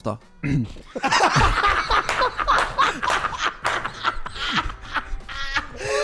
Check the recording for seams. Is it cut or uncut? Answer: uncut